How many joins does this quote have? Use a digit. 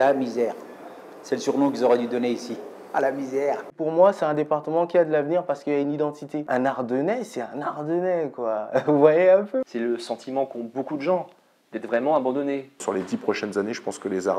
4